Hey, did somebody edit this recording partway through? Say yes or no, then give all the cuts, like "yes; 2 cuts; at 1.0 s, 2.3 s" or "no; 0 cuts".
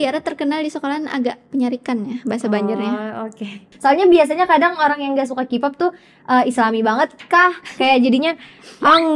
yes; 1 cut; at 3.7 s